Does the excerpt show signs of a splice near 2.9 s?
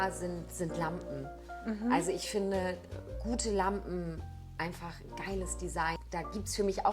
no; 1 cut; at 6.0 s

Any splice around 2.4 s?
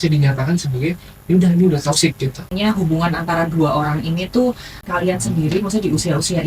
yes; 2 cuts; at 2.4 s, 4.7 s

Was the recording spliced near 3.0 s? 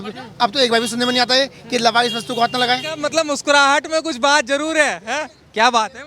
yes; 1 cut; at 3.0 s

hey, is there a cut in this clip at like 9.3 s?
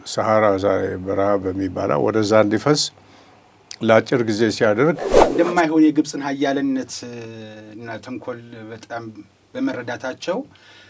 no; 1 cut; at 5.2 s

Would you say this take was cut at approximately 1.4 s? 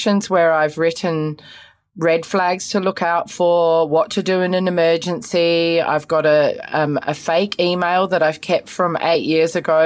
no; 0 cuts

